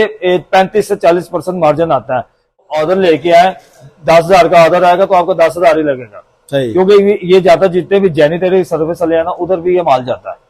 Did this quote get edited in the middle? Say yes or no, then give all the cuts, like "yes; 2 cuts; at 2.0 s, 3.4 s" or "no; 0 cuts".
yes; 1 cut; at 2.6 s